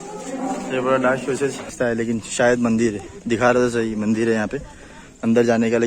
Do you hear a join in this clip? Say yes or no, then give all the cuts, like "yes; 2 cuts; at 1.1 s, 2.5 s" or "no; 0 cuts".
yes; 1 cut; at 1.7 s